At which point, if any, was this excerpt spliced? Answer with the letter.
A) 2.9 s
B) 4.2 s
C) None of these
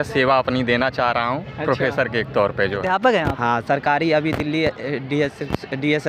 A